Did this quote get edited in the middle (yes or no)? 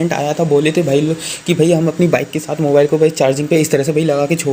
no